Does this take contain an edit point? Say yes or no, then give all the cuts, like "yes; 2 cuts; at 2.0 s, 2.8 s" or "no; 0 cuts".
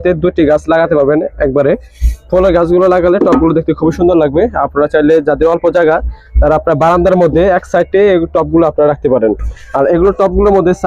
no; 0 cuts